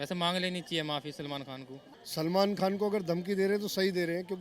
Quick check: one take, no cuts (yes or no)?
no